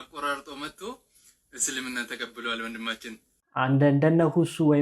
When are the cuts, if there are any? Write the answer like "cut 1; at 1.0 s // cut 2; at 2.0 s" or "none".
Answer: cut 1; at 3.3 s